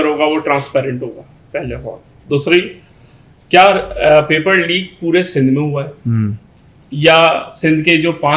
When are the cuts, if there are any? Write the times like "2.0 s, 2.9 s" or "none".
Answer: none